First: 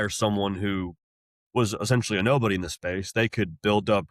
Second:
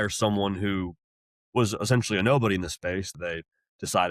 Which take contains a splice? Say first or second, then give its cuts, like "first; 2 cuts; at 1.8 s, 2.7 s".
second; 1 cut; at 3.1 s